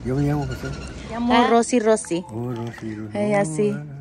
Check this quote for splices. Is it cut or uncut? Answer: cut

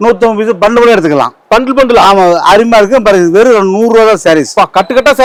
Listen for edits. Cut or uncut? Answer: uncut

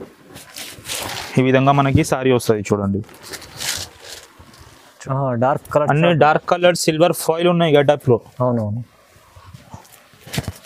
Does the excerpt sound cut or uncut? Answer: cut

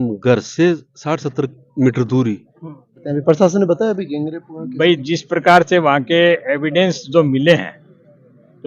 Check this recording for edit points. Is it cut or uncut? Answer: cut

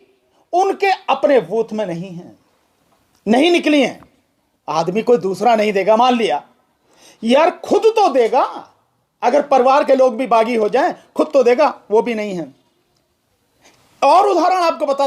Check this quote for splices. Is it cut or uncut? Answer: uncut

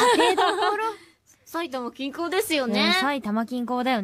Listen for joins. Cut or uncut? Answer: uncut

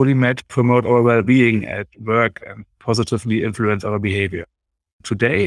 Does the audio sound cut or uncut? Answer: uncut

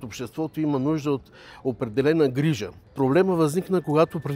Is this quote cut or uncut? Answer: cut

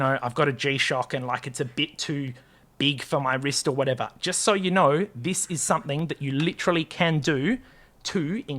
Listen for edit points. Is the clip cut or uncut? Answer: uncut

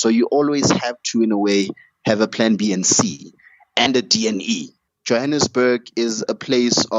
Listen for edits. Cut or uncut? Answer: cut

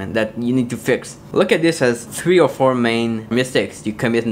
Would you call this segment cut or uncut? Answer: cut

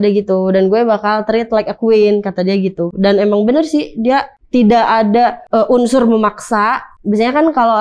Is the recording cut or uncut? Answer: cut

